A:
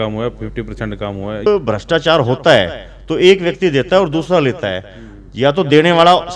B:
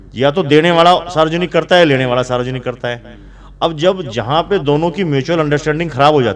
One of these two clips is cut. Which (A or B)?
A